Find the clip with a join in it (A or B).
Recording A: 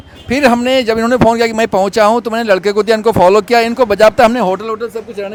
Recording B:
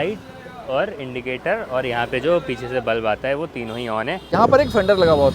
B